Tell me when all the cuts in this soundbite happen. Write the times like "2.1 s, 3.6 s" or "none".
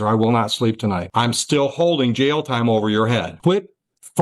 1.0 s, 3.3 s